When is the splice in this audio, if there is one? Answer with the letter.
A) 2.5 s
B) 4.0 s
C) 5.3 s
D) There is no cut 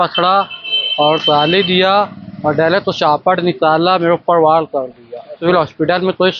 C